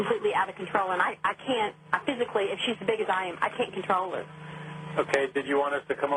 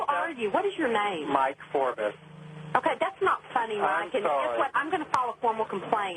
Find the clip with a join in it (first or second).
second